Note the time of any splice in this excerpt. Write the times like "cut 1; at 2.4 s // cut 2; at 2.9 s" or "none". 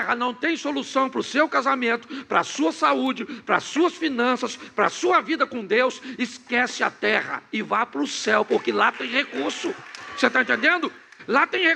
none